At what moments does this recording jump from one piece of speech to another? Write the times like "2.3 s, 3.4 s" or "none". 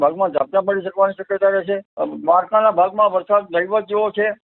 2.0 s

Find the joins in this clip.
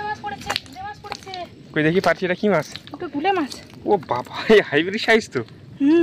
none

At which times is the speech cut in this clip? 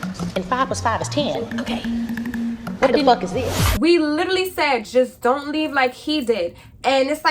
3.7 s

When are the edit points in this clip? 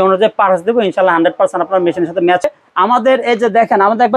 2.5 s

